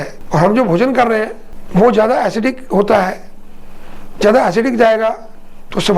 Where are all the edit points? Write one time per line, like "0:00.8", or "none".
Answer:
none